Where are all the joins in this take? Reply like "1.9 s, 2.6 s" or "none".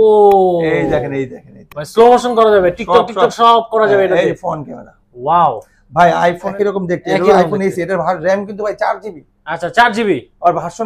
6.5 s